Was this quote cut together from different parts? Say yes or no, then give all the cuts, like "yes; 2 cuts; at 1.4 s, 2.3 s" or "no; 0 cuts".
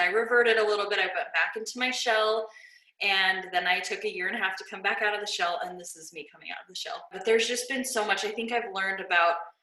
yes; 1 cut; at 7.2 s